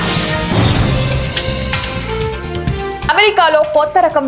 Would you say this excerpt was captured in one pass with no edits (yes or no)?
no